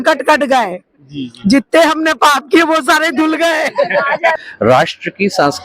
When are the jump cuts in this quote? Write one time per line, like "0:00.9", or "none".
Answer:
0:04.4